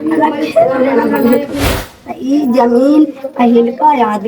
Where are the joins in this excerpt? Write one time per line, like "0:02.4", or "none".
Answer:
0:01.6